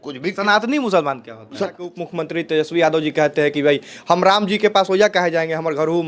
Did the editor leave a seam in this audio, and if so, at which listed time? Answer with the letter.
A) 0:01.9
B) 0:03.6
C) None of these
A